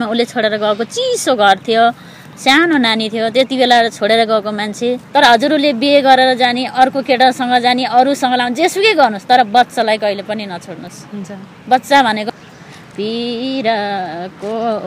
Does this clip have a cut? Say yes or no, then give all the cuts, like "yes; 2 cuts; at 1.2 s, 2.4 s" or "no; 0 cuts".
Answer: yes; 2 cuts; at 5.0 s, 12.2 s